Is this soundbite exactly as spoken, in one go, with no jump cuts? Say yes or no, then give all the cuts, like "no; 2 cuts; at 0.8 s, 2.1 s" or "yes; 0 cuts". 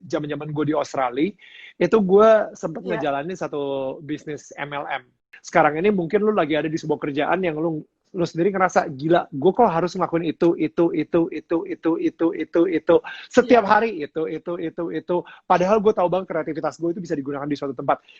no; 1 cut; at 5.2 s